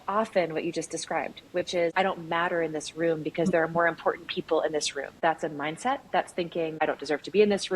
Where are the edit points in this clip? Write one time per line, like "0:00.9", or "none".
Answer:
0:01.9
0:05.2
0:06.8